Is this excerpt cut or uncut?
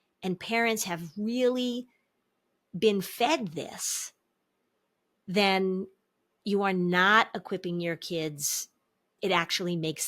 cut